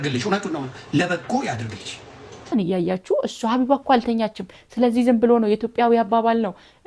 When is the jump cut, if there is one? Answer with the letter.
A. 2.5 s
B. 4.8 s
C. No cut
A